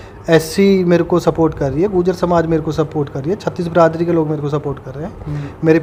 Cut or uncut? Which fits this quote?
uncut